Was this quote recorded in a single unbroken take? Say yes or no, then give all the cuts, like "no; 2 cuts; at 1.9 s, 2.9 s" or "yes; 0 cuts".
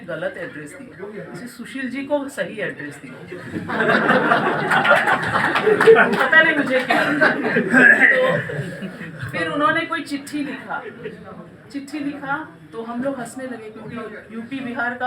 yes; 0 cuts